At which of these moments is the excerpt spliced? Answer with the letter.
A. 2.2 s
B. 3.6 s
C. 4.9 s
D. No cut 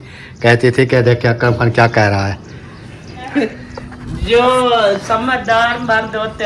B